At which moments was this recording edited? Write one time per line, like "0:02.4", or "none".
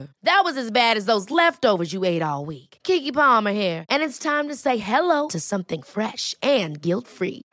none